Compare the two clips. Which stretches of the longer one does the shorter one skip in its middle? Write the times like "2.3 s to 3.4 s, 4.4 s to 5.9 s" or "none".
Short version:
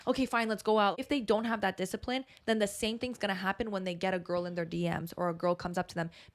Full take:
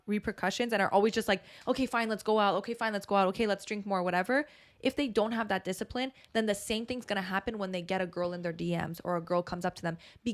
2.6 s to 4.9 s